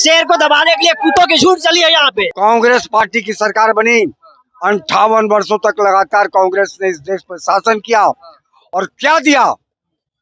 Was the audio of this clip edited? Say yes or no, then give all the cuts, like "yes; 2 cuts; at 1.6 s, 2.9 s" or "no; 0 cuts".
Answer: yes; 1 cut; at 2.2 s